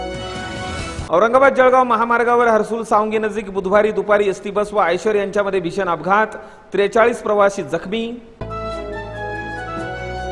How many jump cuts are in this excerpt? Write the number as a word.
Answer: one